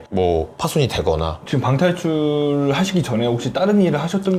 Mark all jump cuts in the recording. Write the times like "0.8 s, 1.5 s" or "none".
1.4 s